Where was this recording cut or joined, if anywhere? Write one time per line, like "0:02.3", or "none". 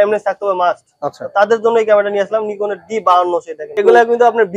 0:03.7

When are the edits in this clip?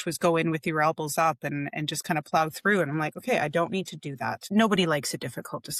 0:04.4

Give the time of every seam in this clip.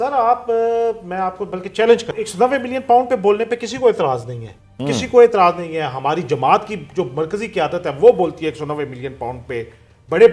0:02.1

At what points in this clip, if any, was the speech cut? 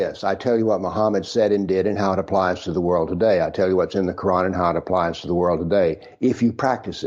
none

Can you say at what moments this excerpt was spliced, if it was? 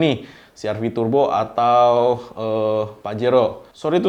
none

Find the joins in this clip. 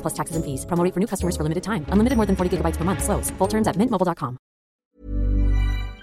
0:04.9

